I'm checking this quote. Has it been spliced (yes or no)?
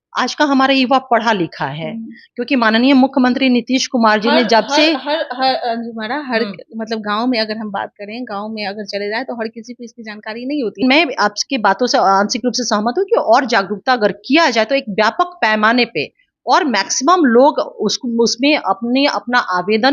yes